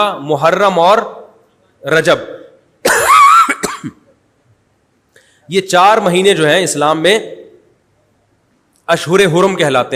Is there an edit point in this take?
no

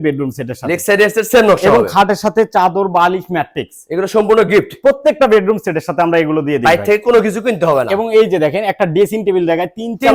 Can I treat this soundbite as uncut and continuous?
yes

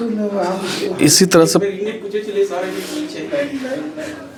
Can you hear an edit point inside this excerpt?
no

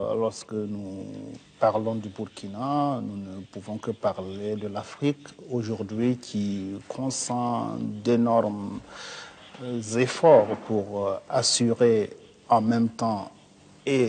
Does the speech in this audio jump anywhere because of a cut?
yes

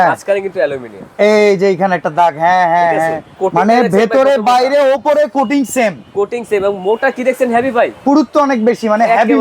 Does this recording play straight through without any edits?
no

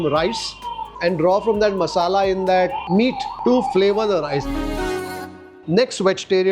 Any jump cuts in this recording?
no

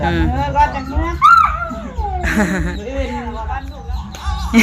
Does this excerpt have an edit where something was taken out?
yes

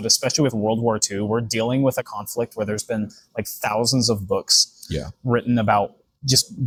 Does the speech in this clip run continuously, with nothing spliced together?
yes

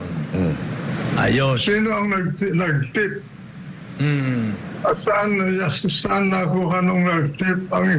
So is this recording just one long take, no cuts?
yes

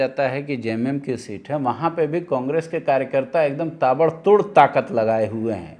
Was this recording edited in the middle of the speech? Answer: no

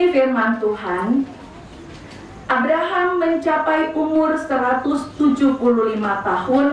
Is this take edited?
no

